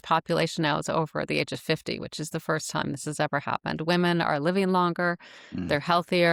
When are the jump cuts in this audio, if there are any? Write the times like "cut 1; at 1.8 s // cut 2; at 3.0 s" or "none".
none